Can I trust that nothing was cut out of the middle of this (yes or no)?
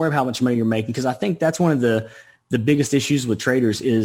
yes